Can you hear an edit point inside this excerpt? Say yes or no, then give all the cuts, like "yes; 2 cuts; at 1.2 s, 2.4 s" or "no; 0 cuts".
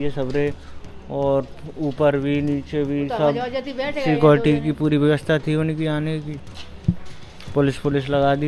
no; 0 cuts